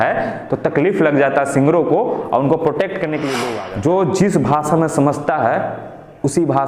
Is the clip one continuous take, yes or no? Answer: no